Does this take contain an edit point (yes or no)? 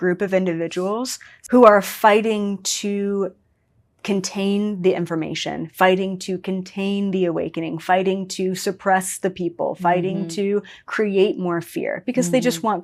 no